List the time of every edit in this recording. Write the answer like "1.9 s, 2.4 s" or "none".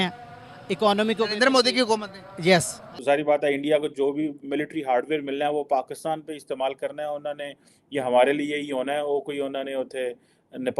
3.0 s